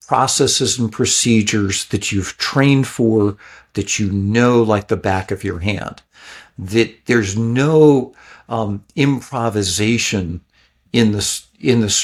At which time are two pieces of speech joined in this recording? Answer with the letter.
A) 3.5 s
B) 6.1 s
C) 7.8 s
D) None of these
D